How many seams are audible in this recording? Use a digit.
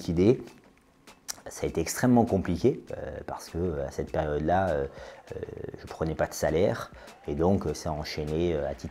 1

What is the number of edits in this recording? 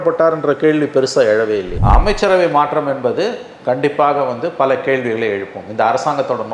1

